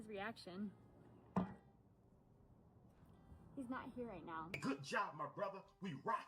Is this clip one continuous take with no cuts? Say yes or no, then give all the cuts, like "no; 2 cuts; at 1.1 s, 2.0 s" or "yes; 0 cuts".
no; 1 cut; at 4.5 s